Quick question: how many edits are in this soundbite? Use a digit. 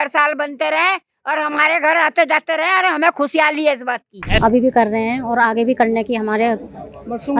1